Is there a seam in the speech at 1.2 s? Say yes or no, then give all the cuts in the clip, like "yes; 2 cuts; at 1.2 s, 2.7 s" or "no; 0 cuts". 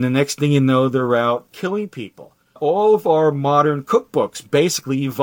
no; 1 cut; at 2.6 s